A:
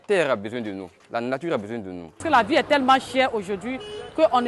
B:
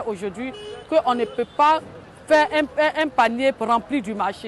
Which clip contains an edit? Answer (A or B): A